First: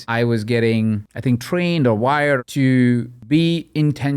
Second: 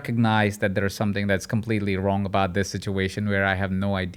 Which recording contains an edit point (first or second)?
first